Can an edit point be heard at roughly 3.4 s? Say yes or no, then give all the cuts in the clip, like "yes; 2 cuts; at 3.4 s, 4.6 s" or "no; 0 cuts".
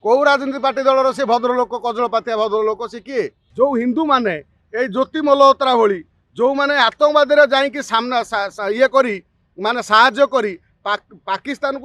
yes; 1 cut; at 3.4 s